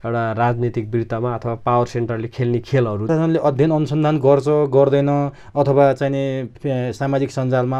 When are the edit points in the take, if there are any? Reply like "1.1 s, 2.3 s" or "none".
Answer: 3.1 s